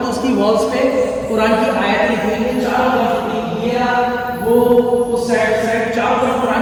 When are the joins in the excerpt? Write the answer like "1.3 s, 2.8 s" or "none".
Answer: none